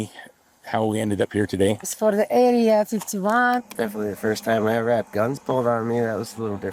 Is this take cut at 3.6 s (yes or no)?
yes